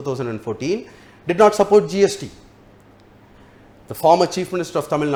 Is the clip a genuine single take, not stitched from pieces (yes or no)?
yes